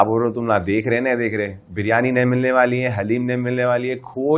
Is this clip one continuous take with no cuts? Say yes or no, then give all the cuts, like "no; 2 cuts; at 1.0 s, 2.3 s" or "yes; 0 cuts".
yes; 0 cuts